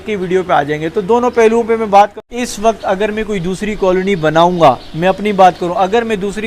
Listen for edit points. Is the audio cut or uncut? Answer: cut